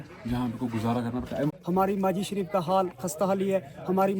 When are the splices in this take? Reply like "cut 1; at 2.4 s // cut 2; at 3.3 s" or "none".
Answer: cut 1; at 1.5 s